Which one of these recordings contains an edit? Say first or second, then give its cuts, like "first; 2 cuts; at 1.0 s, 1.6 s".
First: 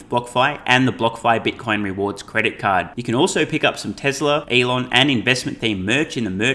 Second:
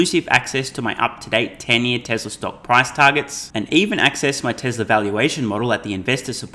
first; 1 cut; at 4.5 s